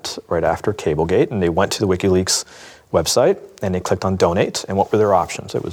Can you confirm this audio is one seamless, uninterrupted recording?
yes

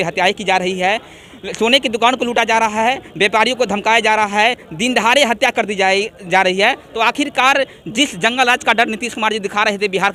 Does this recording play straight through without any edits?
yes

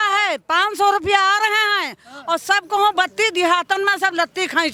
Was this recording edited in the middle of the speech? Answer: no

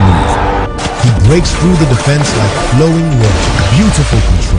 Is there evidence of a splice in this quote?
yes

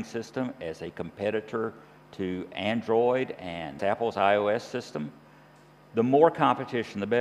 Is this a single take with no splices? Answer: yes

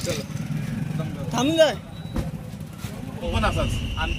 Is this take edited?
yes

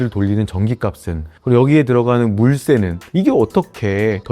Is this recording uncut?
no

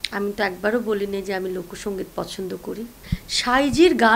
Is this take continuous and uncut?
yes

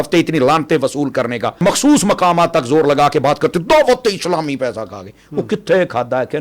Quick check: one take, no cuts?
no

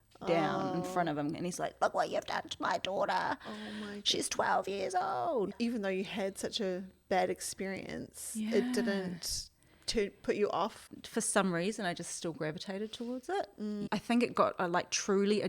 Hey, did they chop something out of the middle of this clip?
yes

